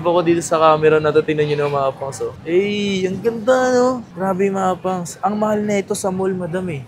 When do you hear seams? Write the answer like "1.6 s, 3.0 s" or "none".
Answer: 4.1 s

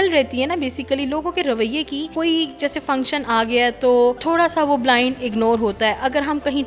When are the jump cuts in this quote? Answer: 2.1 s, 4.2 s

